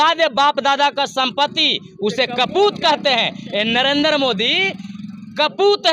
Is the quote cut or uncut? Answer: uncut